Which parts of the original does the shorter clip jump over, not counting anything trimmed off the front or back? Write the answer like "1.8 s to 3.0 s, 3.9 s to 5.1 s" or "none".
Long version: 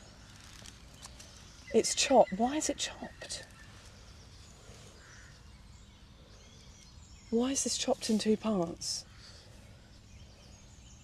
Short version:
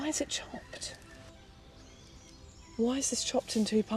3.8 s to 5.8 s